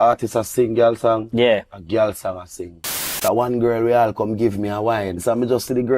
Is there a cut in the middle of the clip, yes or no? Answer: yes